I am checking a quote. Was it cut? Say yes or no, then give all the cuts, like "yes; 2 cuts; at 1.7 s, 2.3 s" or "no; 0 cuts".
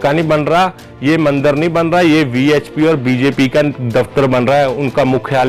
no; 0 cuts